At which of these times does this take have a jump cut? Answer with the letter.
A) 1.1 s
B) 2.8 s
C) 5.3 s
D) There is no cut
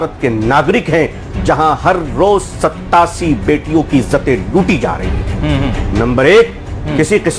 D